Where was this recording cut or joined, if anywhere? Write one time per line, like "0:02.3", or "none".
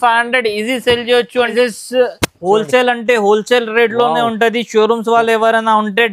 0:01.4